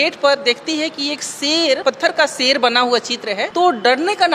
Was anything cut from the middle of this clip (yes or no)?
yes